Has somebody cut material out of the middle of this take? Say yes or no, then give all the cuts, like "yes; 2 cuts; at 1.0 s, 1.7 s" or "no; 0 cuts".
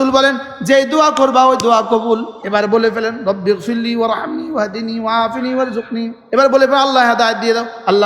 yes; 2 cuts; at 2.3 s, 6.2 s